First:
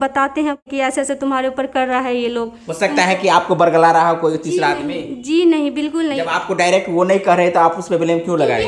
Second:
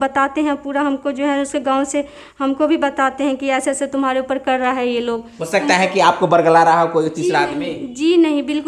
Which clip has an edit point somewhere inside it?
first; 1 cut; at 1.0 s

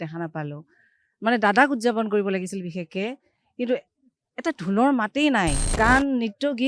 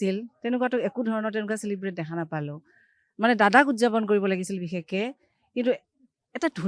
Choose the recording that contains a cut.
first; 1 cut; at 5.6 s

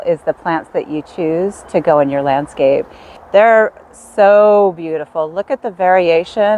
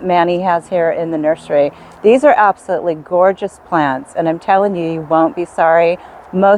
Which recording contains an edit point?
first; 1 cut; at 3.2 s

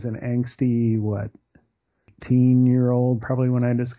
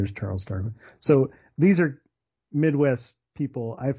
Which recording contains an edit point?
first; 1 cut; at 2.1 s

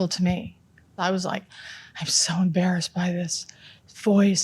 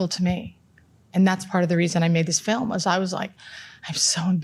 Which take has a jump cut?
first; 1 cut; at 0.9 s

